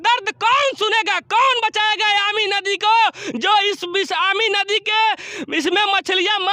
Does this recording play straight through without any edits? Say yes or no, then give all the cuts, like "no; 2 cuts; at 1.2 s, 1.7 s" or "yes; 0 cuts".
yes; 0 cuts